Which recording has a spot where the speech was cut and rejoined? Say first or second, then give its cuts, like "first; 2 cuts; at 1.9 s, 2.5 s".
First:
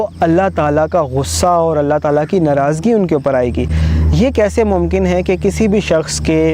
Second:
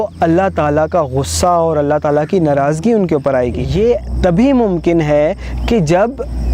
second; 1 cut; at 3.7 s